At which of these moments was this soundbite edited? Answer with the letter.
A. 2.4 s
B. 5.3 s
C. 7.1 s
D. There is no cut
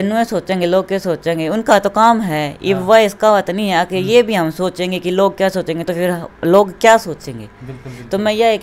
D